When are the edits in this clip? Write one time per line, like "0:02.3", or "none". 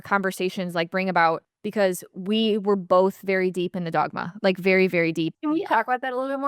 0:01.5
0:05.3